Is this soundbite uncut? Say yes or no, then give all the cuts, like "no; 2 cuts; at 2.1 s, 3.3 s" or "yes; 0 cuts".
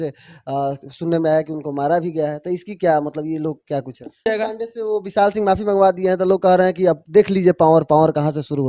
no; 1 cut; at 4.2 s